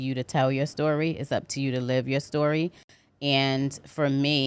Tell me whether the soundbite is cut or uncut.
uncut